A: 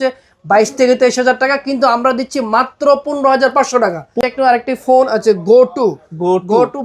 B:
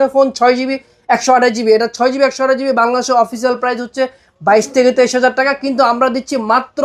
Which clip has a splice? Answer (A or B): A